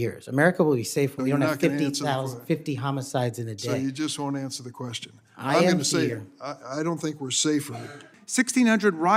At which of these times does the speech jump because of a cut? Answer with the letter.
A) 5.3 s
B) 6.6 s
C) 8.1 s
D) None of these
C